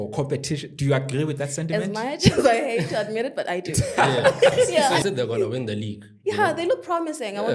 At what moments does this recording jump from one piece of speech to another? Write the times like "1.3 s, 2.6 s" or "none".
4.7 s